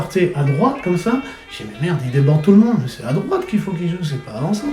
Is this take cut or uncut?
uncut